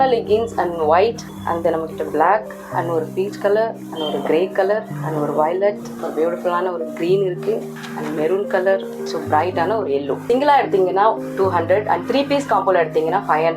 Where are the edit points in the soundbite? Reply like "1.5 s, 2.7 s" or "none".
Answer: 1.3 s, 2.6 s, 3.9 s, 4.9 s, 6.0 s, 7.7 s, 9.0 s, 10.2 s

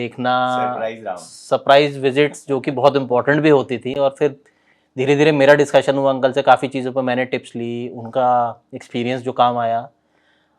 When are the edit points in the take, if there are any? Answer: none

